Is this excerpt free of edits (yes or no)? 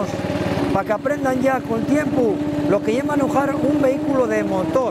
yes